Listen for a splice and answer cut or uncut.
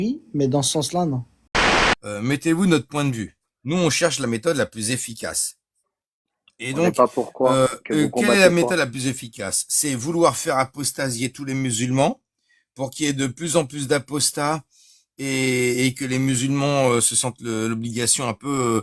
cut